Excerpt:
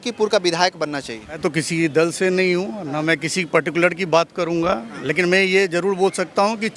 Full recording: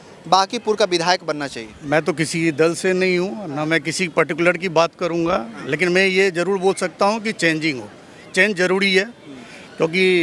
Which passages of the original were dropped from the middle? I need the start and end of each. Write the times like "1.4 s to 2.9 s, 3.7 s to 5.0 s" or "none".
1.9 s to 2.0 s

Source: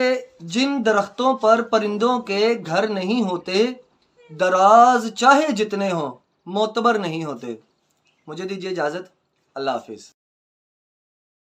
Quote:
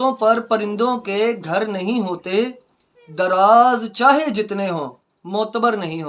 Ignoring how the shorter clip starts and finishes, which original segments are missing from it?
none

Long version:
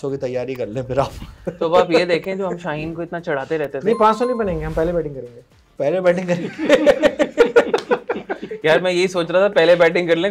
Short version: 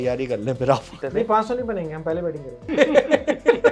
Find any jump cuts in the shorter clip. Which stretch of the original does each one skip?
1.3 s to 3.7 s, 5.3 s to 6.5 s

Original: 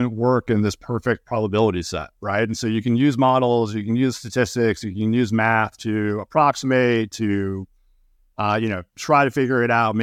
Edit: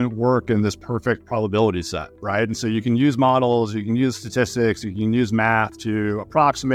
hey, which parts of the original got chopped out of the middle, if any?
none

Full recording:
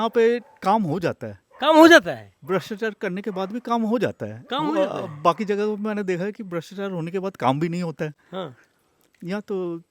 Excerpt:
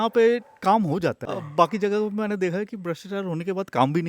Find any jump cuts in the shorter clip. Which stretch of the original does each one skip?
1.4 s to 5.0 s

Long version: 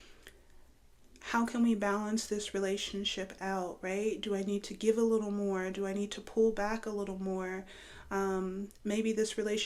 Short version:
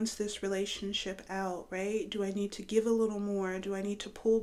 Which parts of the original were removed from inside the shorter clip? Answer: none

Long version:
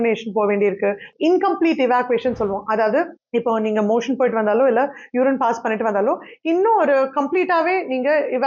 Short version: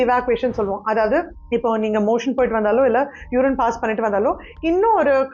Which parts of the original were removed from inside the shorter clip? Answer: none

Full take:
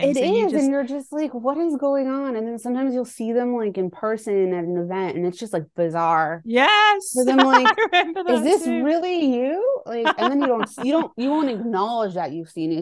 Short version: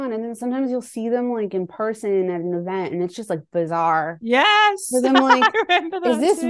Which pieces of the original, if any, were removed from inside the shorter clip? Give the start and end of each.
none

